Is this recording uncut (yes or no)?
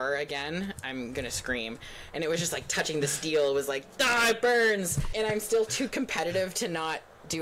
no